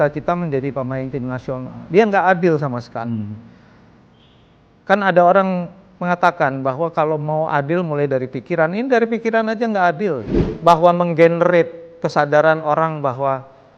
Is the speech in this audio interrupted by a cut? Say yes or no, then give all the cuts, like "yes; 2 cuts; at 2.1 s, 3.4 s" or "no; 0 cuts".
yes; 1 cut; at 10.3 s